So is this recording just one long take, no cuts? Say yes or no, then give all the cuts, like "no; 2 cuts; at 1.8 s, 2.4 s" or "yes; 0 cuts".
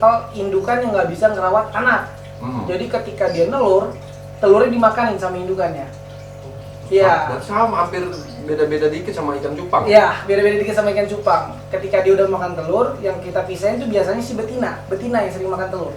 yes; 0 cuts